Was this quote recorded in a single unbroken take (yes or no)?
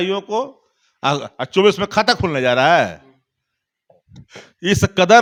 yes